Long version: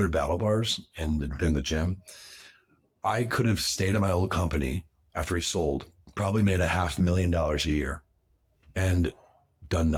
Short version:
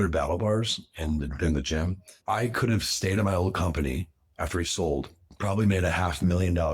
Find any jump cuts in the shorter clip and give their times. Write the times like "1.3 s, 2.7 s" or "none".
2.1 s